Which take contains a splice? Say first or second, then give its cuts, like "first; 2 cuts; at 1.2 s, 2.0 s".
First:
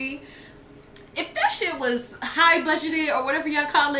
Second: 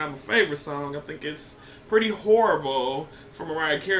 first; 1 cut; at 1.5 s